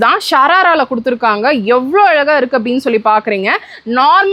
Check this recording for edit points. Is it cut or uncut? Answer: uncut